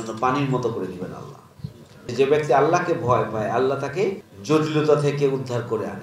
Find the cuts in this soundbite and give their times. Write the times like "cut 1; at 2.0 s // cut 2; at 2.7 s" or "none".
cut 1; at 2.1 s // cut 2; at 4.3 s